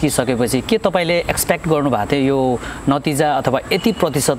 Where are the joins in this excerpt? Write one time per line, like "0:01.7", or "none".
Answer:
none